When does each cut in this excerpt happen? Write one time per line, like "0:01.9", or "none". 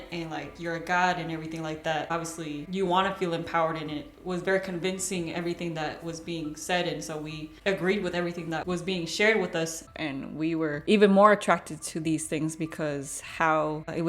0:02.1
0:07.5
0:09.9